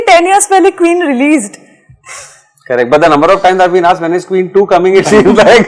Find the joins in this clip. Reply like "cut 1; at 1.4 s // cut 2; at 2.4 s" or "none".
none